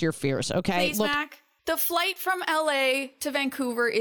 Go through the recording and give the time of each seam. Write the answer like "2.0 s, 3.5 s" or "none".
none